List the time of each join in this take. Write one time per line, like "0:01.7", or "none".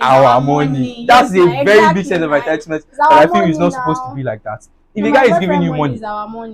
none